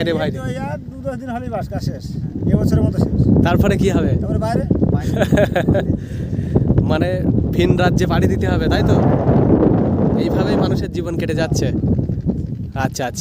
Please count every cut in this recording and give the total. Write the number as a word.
zero